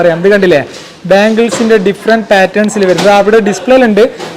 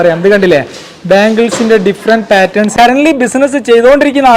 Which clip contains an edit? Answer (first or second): second